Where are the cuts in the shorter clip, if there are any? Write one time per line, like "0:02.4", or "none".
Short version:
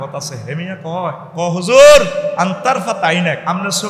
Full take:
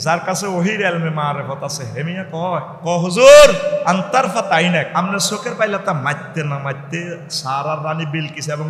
none